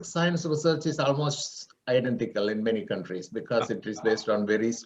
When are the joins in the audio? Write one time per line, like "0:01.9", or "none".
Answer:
none